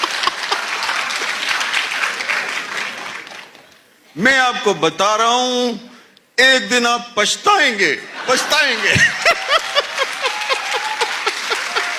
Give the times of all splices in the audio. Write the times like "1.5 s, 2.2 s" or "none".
none